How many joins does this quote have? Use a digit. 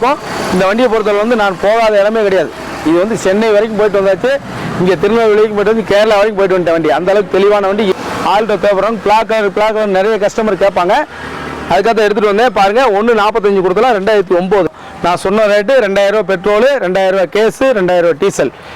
2